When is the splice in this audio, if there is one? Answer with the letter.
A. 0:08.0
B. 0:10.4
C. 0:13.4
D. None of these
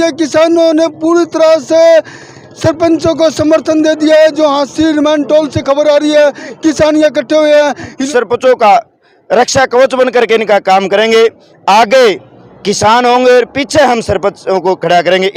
A